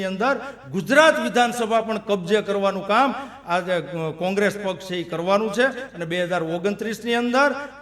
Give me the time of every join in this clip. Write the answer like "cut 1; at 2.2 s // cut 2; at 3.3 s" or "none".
none